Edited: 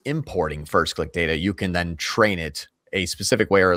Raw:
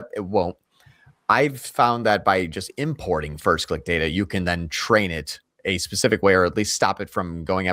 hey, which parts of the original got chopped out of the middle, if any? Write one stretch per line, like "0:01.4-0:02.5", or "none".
none

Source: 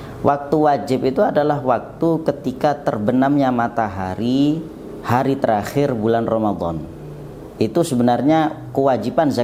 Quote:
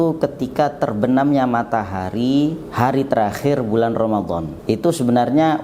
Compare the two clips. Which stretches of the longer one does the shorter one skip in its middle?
0:04.7-0:05.0
0:06.8-0:07.4

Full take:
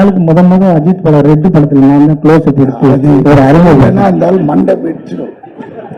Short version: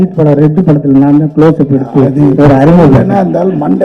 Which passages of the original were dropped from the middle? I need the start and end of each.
none

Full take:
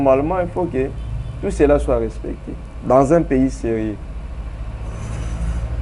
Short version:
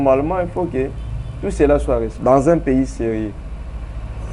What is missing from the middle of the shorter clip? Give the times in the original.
0:02.1-0:02.8

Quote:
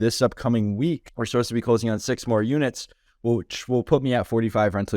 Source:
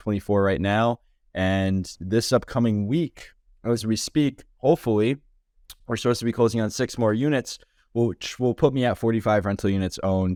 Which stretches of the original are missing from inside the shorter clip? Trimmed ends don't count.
0:03.2-0:05.8

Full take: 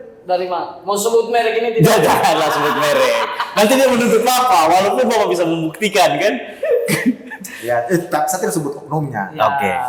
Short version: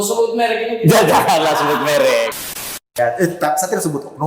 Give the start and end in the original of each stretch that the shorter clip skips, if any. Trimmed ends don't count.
0:03.5-0:07.2

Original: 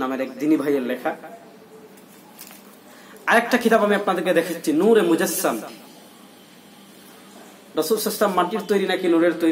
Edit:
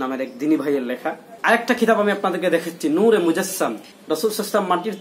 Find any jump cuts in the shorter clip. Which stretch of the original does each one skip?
0:01.3-0:03.1
0:05.7-0:07.6

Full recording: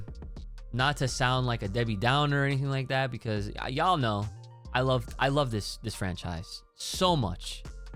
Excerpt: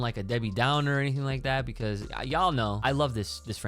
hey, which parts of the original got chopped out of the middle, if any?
0:04.2-0:05.1

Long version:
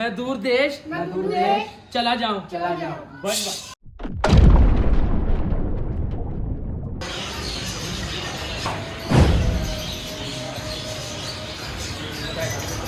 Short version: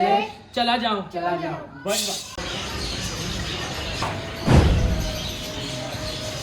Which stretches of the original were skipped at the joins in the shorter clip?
0:03.7-0:07.0

